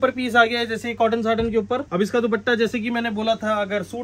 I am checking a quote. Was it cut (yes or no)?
yes